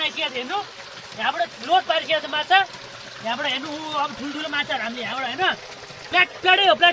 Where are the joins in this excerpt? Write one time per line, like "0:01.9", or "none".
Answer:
none

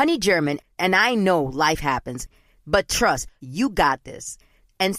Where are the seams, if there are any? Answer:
none

